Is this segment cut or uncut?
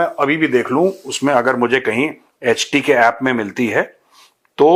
uncut